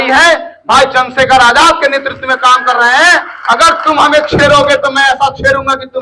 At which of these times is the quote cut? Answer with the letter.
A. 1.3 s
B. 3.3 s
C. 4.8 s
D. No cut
D